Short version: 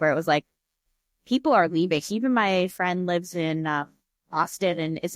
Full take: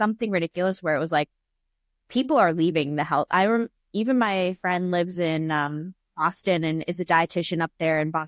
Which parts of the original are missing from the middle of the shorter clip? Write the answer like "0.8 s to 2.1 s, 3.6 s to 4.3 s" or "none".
2.9 s to 3.9 s